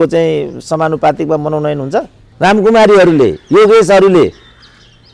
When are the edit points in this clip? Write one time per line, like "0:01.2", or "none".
0:02.2